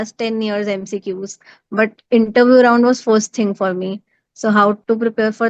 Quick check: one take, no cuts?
yes; 0 cuts

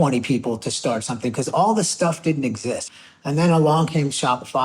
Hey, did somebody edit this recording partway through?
yes; 1 cut; at 2.9 s

